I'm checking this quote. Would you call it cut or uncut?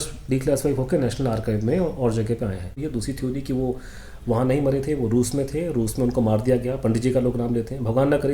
cut